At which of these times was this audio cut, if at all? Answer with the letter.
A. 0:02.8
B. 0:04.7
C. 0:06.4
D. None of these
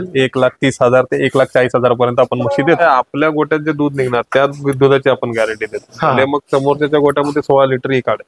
A